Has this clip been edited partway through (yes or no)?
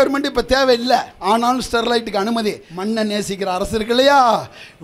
yes